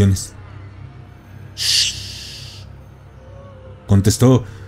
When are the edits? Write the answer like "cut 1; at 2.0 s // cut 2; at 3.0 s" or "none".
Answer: none